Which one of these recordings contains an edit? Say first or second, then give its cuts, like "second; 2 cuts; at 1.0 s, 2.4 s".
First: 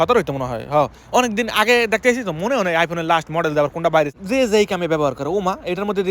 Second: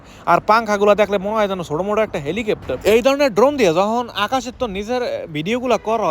first; 1 cut; at 4.2 s